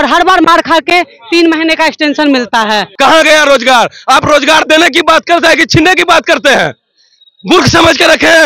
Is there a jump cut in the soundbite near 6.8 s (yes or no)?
no